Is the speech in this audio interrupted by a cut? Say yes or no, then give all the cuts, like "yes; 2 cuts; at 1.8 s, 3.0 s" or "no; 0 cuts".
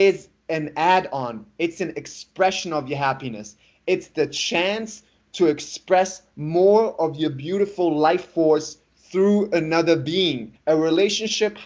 yes; 1 cut; at 10.5 s